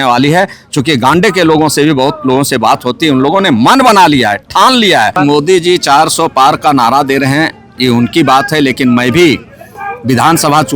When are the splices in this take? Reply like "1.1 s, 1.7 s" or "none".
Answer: 5.2 s